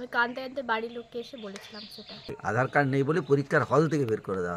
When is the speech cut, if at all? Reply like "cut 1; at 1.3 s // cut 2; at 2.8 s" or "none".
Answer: cut 1; at 2.4 s